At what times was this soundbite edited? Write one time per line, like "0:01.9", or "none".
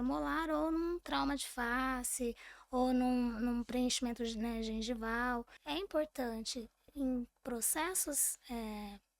0:05.5